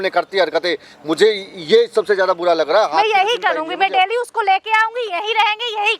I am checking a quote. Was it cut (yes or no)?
no